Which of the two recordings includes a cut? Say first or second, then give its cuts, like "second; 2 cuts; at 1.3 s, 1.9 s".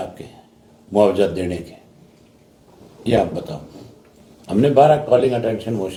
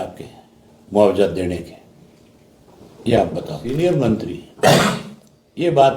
second; 1 cut; at 3.6 s